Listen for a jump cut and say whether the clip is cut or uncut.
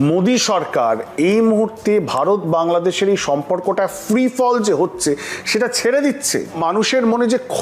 cut